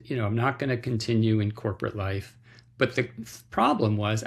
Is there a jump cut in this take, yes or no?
no